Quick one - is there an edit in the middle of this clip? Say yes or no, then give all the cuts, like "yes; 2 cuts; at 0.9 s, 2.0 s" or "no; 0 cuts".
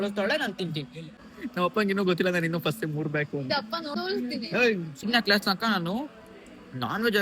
yes; 3 cuts; at 1.0 s, 3.9 s, 5.0 s